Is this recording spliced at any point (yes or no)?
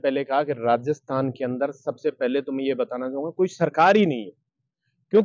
no